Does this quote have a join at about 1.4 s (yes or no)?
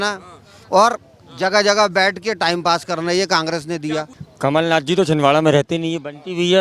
no